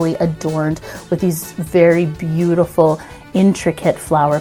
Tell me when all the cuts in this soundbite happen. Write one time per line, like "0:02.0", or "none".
none